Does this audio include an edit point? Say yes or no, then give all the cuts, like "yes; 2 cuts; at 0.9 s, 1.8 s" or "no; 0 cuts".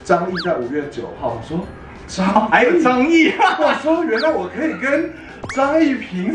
no; 0 cuts